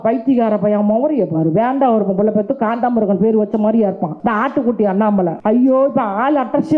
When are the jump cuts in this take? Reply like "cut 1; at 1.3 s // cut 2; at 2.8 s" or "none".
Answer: cut 1; at 4.1 s // cut 2; at 5.4 s